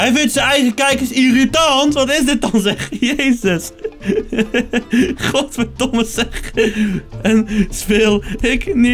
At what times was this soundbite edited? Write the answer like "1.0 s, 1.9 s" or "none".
none